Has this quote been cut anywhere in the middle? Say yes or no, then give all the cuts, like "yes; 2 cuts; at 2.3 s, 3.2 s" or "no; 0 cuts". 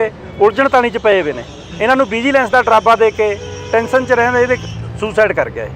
no; 0 cuts